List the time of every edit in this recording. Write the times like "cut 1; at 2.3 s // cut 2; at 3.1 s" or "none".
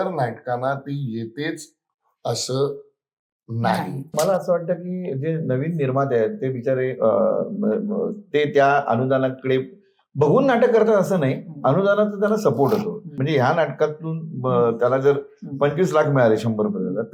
cut 1; at 4.1 s // cut 2; at 13.2 s